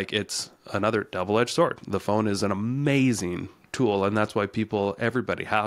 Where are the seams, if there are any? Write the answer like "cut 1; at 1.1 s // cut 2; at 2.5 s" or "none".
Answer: none